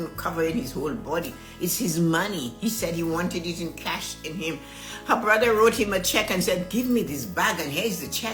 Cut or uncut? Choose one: uncut